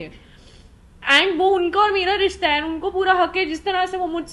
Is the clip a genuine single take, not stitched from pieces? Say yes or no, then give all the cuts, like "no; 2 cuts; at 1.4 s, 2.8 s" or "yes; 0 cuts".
yes; 0 cuts